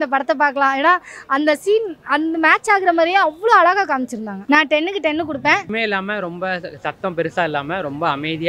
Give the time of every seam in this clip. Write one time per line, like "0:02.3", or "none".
0:04.3
0:05.7